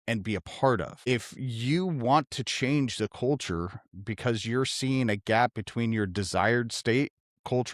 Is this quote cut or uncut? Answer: cut